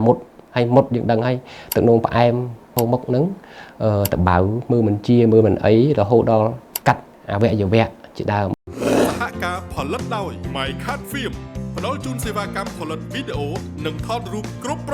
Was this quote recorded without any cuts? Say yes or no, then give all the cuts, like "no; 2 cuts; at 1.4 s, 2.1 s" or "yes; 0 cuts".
no; 2 cuts; at 2.7 s, 8.5 s